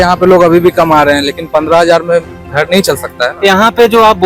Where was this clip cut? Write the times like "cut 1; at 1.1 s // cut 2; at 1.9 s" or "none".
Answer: none